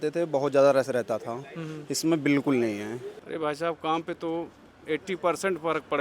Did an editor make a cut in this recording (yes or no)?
yes